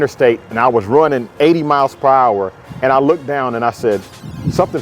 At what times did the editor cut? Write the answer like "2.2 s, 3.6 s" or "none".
none